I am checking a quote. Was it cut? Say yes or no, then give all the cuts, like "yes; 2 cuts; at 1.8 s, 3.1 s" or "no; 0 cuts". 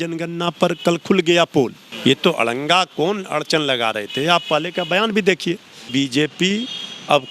yes; 2 cuts; at 1.8 s, 5.9 s